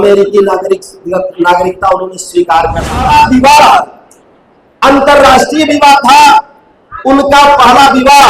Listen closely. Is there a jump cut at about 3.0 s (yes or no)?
yes